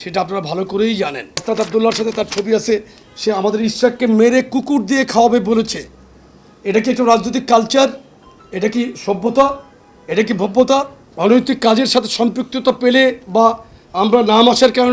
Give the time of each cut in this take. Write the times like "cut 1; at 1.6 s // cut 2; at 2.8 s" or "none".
cut 1; at 1.4 s // cut 2; at 11.0 s